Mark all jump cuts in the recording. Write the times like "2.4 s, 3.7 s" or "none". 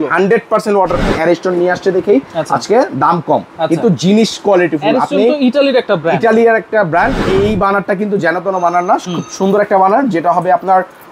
1.0 s, 7.2 s